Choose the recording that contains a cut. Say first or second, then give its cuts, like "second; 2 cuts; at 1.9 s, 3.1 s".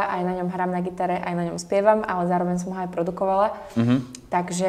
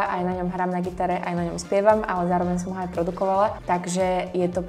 second; 1 cut; at 3.6 s